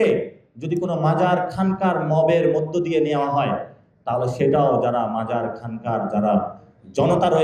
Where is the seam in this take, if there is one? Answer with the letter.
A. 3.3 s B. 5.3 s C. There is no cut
C